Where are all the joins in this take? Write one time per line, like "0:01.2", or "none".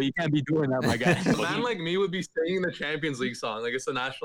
0:01.4